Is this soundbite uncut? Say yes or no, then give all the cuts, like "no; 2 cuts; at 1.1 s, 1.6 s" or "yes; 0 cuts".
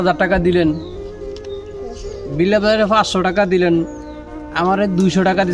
yes; 0 cuts